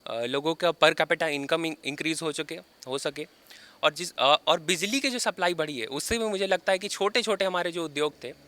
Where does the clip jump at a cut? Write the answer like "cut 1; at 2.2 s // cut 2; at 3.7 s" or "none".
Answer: none